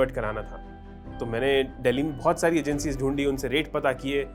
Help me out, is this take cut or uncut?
uncut